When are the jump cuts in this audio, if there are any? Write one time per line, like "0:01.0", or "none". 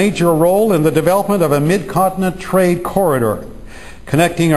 0:03.6